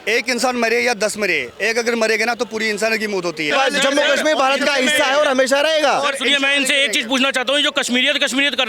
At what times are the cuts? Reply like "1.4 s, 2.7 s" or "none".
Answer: 3.5 s

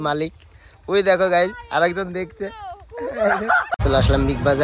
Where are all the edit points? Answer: 3.7 s

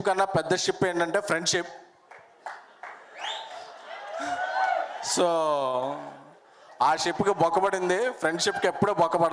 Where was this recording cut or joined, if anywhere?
none

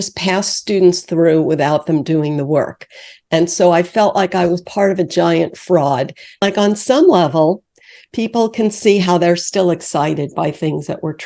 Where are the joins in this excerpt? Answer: 6.4 s

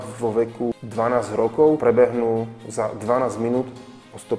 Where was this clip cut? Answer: 0.7 s, 1.8 s

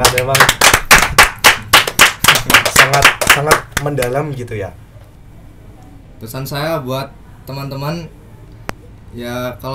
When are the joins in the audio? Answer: 5.1 s

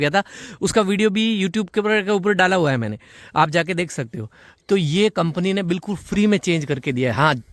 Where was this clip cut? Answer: none

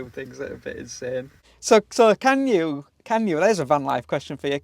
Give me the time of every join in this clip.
1.5 s

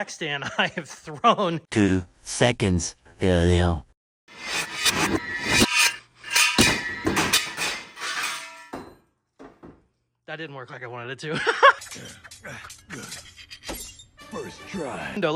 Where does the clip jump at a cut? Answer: none

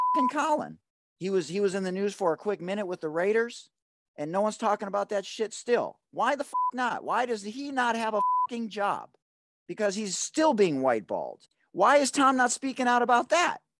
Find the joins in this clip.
none

